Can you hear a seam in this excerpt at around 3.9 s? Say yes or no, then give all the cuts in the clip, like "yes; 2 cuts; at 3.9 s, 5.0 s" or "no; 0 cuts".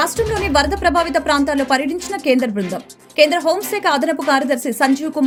no; 0 cuts